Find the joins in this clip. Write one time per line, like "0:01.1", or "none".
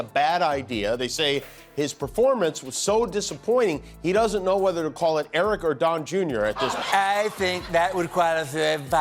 0:06.8